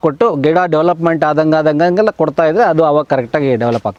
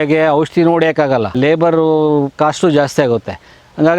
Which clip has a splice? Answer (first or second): second